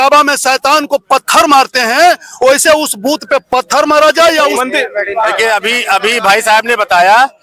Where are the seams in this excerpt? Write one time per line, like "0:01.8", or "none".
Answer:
none